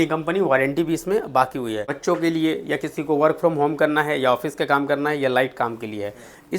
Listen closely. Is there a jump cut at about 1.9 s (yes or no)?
yes